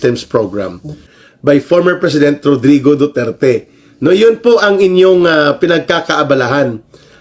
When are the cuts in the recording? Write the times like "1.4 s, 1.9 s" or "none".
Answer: 1.1 s